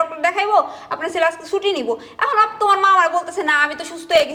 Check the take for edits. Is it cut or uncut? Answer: uncut